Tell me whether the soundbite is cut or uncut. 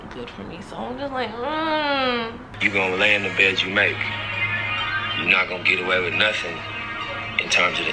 cut